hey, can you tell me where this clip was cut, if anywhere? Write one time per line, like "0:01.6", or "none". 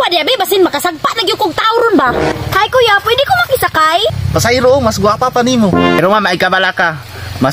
0:02.3
0:04.1
0:06.0